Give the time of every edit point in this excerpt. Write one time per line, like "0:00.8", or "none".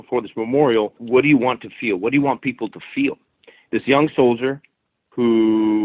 0:01.0
0:03.5